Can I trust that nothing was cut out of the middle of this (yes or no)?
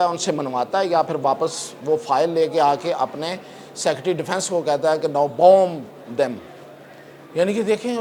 yes